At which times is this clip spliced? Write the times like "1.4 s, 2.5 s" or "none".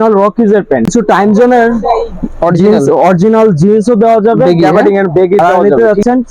0.9 s, 5.4 s